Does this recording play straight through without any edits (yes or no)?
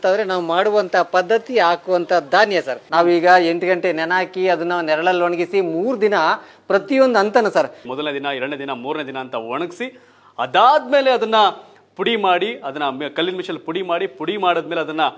no